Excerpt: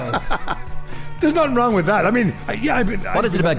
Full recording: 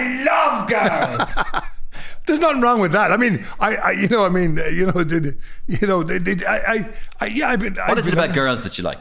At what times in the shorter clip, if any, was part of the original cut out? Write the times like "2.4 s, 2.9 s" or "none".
2.4 s